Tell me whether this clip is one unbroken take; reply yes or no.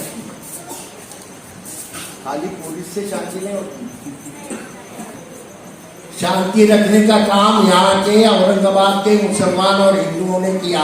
yes